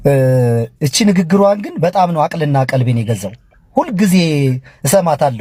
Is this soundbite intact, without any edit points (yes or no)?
yes